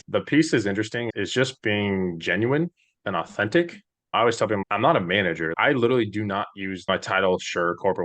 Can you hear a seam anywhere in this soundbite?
yes; 4 cuts; at 1.1 s, 4.6 s, 5.5 s, 6.9 s

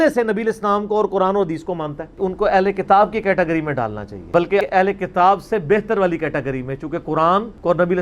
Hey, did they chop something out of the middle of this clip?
yes; 1 cut; at 4.4 s

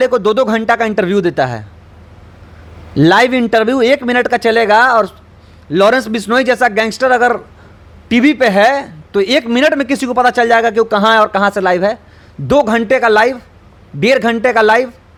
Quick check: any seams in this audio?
no; 0 cuts

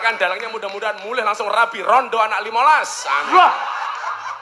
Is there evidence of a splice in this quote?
no; 0 cuts

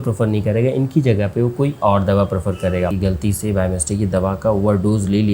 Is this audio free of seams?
no; 1 cut; at 2.9 s

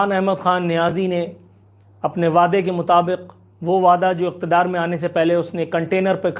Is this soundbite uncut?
yes; 0 cuts

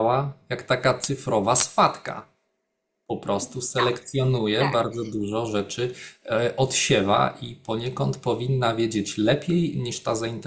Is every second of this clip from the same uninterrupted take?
yes; 0 cuts

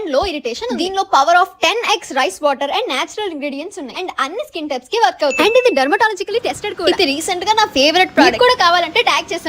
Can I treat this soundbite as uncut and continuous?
no; 3 cuts; at 5.4 s, 6.8 s, 8.3 s

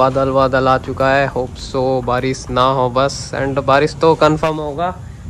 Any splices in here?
no; 0 cuts

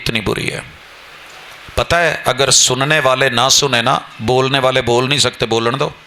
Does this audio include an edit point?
no; 0 cuts

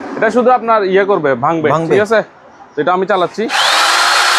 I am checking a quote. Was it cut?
no; 0 cuts

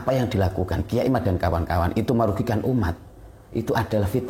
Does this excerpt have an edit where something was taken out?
no; 0 cuts

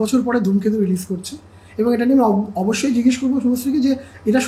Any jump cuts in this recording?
no; 0 cuts

